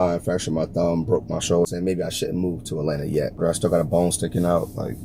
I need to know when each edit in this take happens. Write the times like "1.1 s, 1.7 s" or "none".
1.7 s, 3.4 s